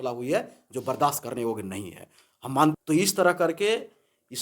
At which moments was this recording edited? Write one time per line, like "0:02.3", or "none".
0:02.7